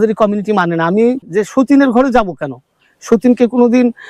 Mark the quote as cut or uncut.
cut